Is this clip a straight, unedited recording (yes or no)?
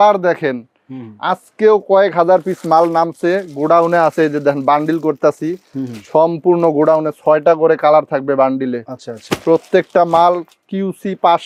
yes